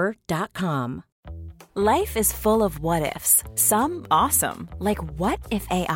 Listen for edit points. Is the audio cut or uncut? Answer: cut